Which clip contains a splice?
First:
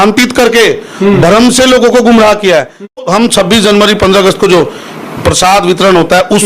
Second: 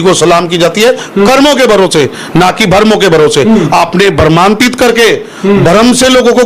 first; 1 cut; at 3.0 s

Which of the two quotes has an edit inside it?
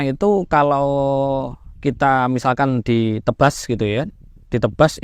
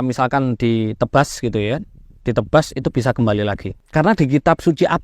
second; 1 cut; at 3.7 s

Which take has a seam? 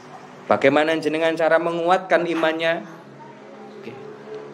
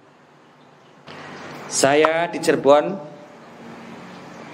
second; 1 cut; at 1.1 s

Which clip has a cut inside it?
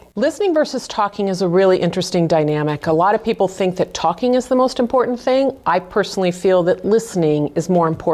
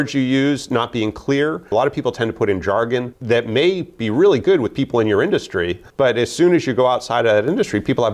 second; 3 cuts; at 1.7 s, 3.1 s, 5.8 s

